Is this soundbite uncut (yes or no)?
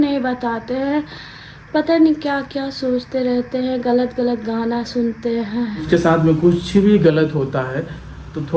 no